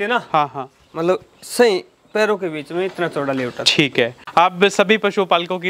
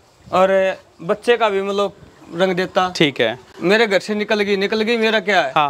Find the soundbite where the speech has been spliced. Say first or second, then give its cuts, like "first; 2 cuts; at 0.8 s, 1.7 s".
first; 1 cut; at 4.2 s